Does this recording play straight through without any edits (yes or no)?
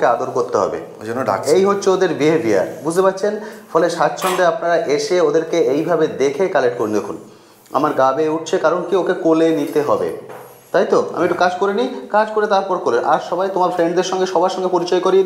yes